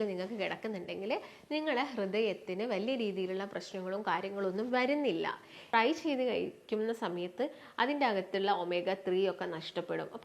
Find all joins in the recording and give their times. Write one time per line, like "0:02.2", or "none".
0:05.6

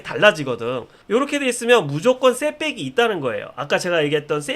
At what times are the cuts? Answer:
0:00.9

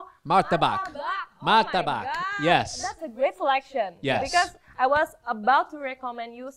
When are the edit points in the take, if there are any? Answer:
none

